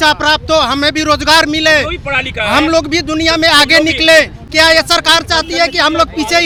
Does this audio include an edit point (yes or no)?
no